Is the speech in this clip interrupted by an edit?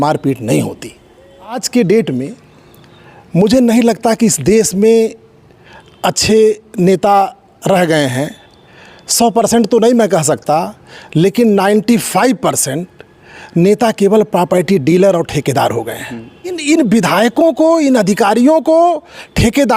yes; 2 cuts; at 1.6 s, 16.6 s

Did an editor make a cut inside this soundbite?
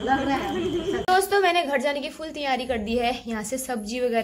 yes; 1 cut; at 1.0 s

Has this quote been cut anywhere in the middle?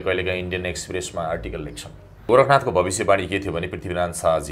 yes; 1 cut; at 2.3 s

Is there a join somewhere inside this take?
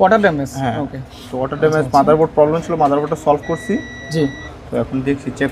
no; 0 cuts

